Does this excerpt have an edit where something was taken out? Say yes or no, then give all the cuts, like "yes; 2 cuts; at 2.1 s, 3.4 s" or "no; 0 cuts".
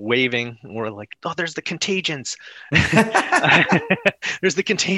no; 0 cuts